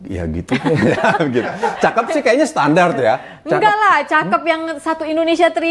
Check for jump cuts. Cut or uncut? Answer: uncut